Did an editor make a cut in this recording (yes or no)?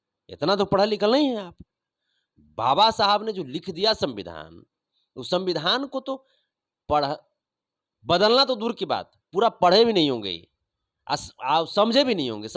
no